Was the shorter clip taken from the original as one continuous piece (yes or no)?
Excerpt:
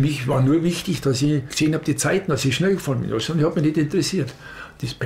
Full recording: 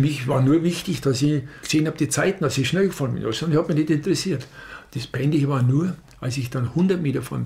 no